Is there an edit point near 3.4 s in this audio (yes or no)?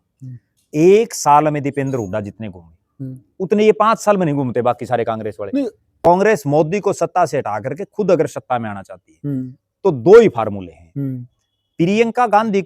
no